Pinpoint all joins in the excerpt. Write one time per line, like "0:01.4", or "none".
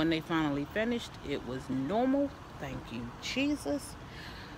none